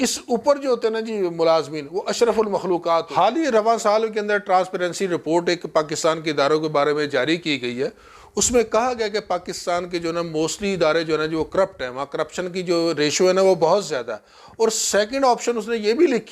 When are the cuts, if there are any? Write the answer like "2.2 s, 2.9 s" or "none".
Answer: 3.1 s